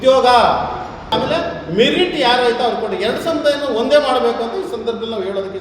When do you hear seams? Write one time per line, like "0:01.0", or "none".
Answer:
0:01.1